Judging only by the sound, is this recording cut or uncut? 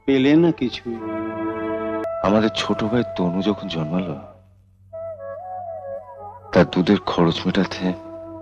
cut